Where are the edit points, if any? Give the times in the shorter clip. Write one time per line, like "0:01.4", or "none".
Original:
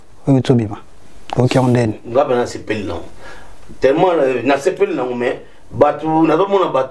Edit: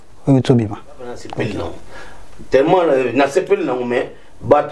0:01.3